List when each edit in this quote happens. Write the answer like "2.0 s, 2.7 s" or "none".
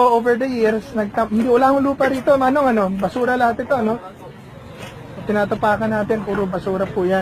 none